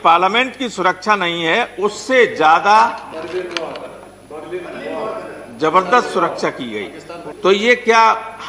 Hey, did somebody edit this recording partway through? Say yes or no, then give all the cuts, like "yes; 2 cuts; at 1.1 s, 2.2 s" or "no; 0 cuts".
yes; 1 cut; at 7.2 s